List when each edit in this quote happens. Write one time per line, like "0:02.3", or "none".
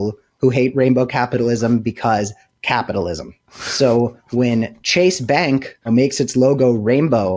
0:05.9